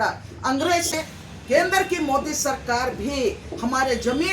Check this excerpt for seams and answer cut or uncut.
cut